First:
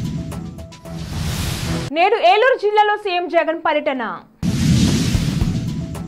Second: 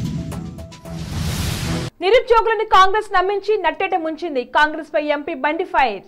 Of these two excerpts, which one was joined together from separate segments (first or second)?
second